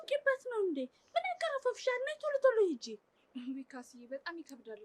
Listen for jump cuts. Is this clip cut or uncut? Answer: uncut